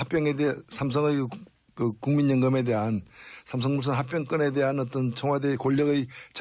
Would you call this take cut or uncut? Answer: uncut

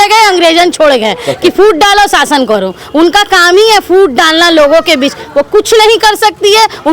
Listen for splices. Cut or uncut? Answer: uncut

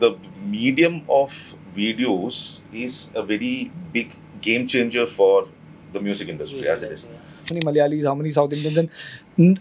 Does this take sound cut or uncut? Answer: cut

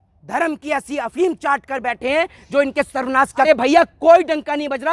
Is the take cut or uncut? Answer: cut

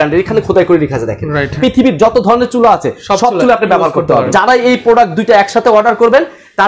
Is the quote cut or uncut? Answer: cut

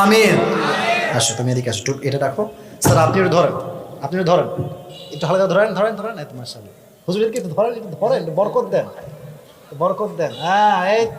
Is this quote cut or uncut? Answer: cut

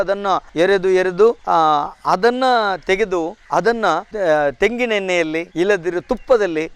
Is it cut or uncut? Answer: uncut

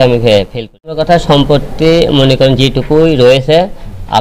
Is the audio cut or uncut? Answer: cut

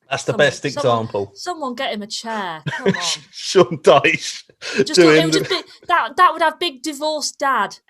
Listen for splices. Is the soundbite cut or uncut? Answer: uncut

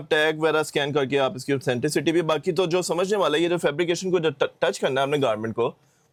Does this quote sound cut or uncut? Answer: uncut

